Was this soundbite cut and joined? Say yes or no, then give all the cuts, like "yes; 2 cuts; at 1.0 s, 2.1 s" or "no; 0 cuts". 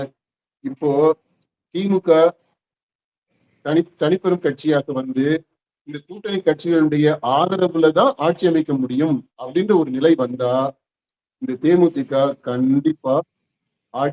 no; 0 cuts